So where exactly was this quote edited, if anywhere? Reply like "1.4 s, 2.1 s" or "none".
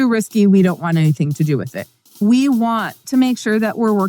2.2 s, 3.0 s